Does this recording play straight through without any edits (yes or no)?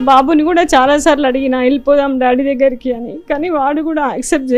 yes